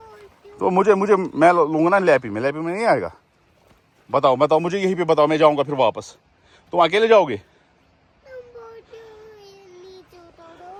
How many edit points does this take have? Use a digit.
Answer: 0